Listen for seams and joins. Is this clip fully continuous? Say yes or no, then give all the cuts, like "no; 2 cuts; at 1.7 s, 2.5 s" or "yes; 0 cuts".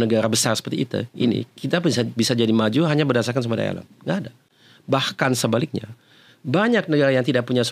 yes; 0 cuts